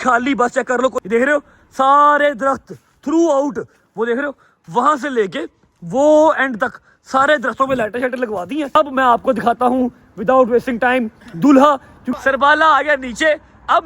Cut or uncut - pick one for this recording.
cut